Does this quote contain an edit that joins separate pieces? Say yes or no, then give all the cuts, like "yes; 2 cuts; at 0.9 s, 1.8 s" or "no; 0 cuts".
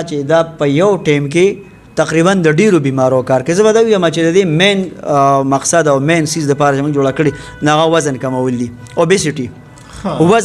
no; 0 cuts